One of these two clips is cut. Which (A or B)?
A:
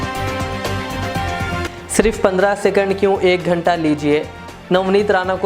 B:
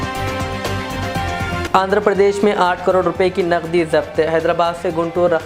A